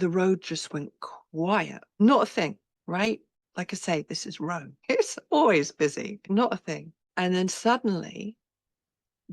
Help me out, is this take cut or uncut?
cut